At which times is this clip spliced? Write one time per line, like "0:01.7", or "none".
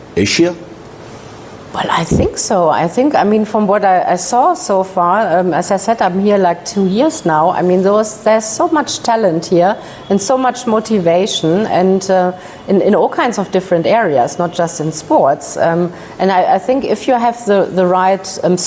none